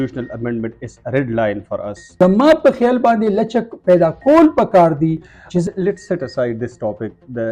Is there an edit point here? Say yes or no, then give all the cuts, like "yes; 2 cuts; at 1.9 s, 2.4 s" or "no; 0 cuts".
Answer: yes; 2 cuts; at 2.0 s, 5.6 s